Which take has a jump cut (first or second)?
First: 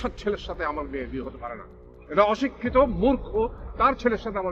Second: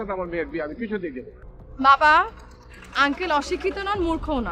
second